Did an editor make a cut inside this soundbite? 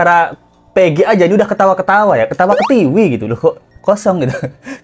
no; 0 cuts

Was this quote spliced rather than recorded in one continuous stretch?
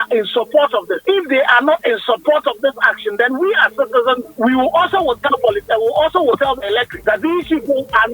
yes; 3 cuts; at 1.0 s, 4.3 s, 6.9 s

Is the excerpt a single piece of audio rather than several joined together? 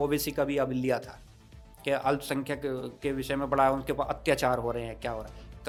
yes; 0 cuts

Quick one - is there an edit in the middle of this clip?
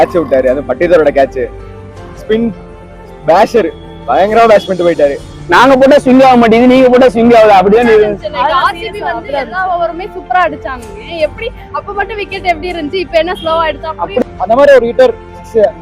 yes; 2 cuts; at 5.3 s, 14.2 s

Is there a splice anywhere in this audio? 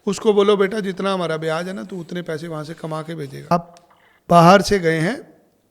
yes; 1 cut; at 3.5 s

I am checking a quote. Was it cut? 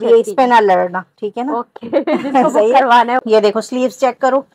yes; 1 cut; at 3.2 s

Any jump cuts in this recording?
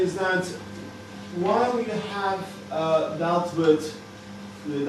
yes; 1 cut; at 3.0 s

